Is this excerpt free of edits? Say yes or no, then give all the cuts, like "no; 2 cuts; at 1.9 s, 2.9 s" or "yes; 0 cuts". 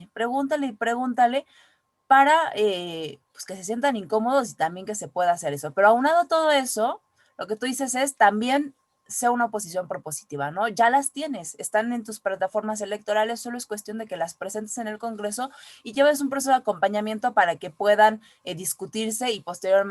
yes; 0 cuts